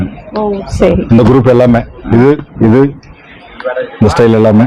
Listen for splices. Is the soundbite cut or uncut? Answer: uncut